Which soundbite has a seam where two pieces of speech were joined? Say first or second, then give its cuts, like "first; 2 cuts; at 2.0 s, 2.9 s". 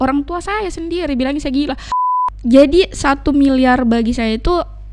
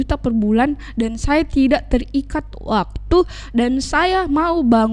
first; 1 cut; at 1.9 s